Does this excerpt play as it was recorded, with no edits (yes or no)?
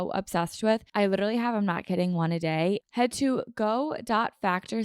no